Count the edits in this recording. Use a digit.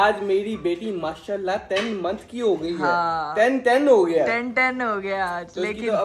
0